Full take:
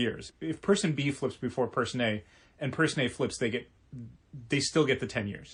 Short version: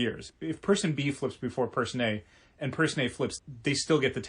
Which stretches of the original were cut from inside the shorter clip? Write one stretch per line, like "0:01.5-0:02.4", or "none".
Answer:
0:03.3-0:04.2